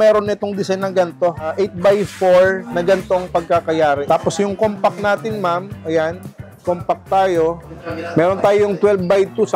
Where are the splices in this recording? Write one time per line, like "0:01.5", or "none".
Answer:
0:01.5
0:02.7
0:04.0